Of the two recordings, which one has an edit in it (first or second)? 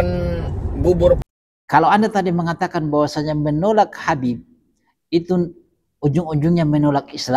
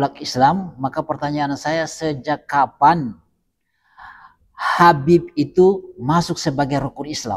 first